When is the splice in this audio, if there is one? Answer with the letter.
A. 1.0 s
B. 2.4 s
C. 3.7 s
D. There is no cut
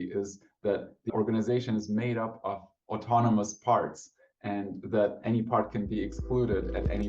A